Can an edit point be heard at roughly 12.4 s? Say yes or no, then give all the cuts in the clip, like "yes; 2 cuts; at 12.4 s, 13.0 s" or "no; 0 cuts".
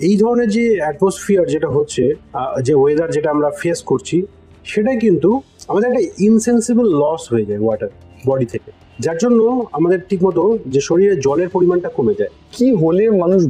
yes; 2 cuts; at 5.5 s, 12.4 s